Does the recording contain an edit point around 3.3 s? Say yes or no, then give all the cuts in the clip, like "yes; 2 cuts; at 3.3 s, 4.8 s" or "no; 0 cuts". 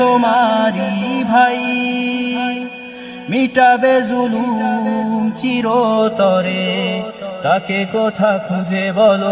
no; 0 cuts